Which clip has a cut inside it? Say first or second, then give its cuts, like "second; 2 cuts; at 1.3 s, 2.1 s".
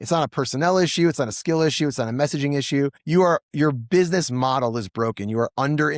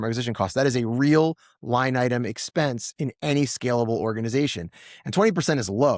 first; 1 cut; at 3.0 s